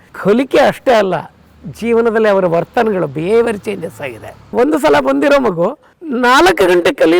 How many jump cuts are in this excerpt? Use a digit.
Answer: 1